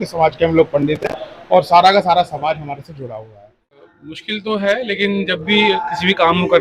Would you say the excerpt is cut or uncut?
cut